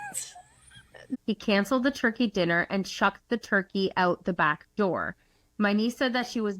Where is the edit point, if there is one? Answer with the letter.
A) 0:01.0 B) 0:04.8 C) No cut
A